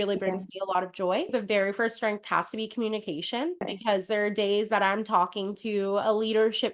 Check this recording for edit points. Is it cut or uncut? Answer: cut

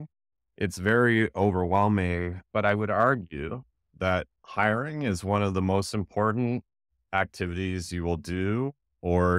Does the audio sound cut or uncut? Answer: uncut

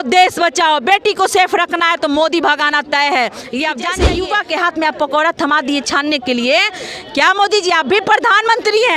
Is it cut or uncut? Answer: cut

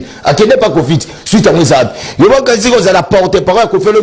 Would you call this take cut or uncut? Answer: uncut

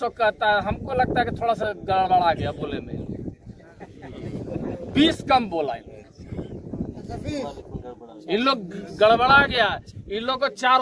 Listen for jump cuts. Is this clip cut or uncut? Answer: uncut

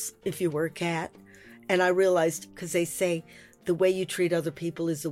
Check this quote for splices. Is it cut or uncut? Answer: cut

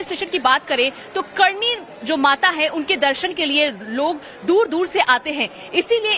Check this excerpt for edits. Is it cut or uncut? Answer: uncut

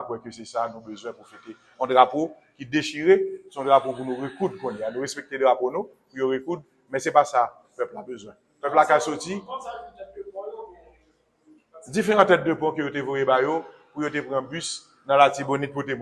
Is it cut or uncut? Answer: uncut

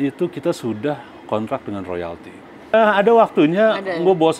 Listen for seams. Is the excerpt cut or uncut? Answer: cut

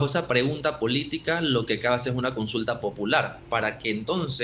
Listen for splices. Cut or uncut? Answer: uncut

